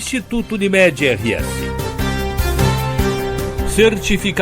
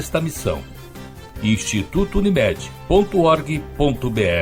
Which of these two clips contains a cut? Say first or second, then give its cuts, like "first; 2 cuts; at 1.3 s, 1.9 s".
first; 2 cuts; at 1.4 s, 3.2 s